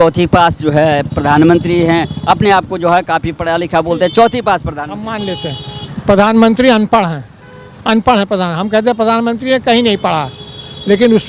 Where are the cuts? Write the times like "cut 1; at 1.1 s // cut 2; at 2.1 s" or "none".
none